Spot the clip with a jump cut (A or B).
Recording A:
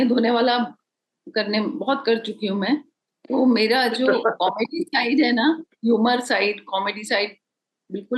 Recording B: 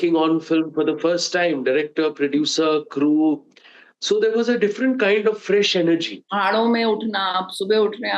B